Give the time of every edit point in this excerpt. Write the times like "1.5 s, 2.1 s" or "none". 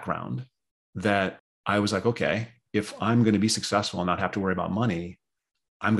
1.5 s